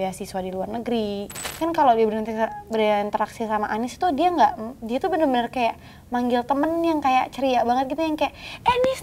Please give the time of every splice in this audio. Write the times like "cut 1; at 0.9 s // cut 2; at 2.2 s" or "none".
cut 1; at 1.4 s